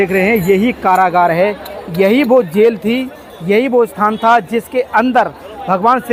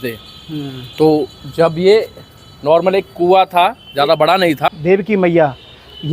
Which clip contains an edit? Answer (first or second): second